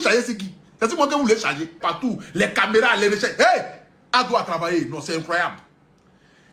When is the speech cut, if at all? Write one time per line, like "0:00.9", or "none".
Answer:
0:01.8